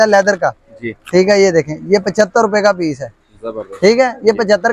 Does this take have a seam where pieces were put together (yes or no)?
no